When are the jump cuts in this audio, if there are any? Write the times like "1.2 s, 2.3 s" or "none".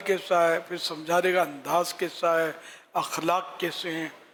none